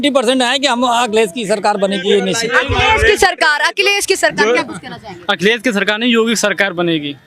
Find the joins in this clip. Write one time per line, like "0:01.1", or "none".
none